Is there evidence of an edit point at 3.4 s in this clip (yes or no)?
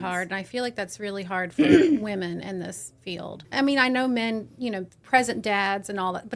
yes